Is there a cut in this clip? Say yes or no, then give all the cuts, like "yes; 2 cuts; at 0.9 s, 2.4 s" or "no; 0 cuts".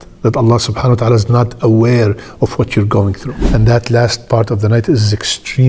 yes; 1 cut; at 3.3 s